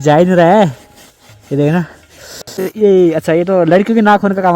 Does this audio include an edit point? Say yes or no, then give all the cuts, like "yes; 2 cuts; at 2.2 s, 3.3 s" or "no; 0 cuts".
yes; 1 cut; at 2.7 s